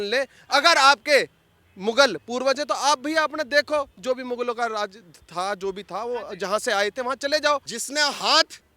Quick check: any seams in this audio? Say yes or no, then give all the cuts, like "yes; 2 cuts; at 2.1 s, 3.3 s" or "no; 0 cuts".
yes; 1 cut; at 7.7 s